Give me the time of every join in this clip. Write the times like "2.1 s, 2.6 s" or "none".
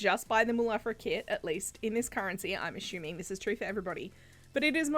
none